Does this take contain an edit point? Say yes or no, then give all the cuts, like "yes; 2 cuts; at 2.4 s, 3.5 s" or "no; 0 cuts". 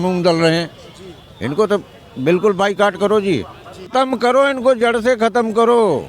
yes; 1 cut; at 3.9 s